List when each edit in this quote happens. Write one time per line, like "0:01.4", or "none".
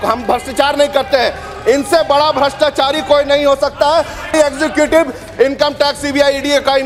none